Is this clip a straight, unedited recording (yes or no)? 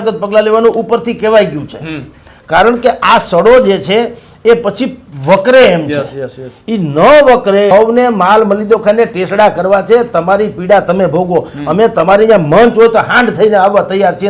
no